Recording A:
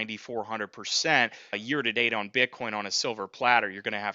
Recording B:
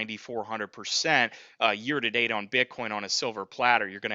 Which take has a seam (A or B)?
A